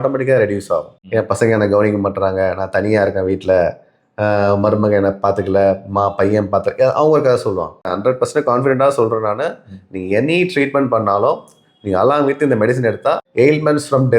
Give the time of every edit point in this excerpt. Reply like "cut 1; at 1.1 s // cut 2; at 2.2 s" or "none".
cut 1; at 1.0 s // cut 2; at 7.9 s // cut 3; at 13.2 s